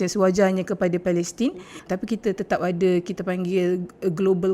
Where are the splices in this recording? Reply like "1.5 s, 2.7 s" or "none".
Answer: 1.7 s